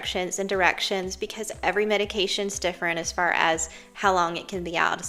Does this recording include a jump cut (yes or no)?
no